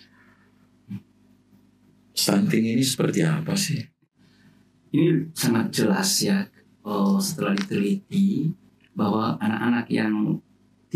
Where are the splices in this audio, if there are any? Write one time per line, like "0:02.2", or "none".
0:04.0